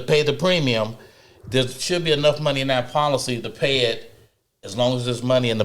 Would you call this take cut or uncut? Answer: uncut